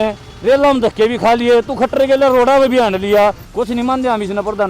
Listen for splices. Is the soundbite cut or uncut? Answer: cut